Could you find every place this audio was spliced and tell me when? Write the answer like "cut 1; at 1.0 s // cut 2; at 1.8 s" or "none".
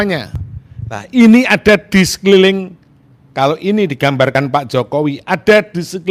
none